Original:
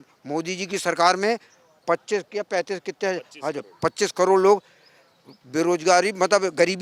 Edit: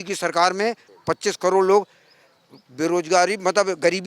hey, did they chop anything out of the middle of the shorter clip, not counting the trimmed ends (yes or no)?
yes